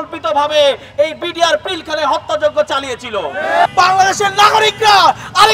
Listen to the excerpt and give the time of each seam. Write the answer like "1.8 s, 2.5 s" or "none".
3.7 s